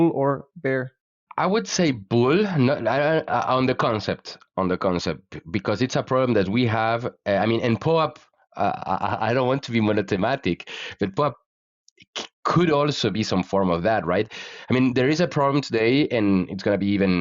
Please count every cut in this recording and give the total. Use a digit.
1